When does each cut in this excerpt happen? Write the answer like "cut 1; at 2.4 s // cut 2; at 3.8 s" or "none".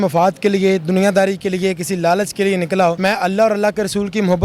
cut 1; at 3.0 s